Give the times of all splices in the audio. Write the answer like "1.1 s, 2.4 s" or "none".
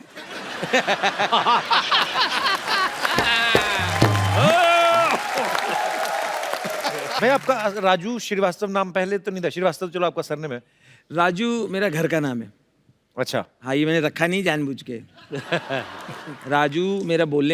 7.2 s